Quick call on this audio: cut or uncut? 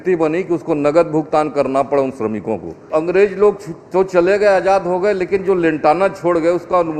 cut